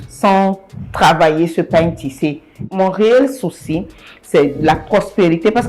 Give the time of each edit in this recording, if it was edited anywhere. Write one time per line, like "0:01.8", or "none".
0:02.6